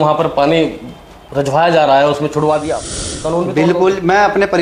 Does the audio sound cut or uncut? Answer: cut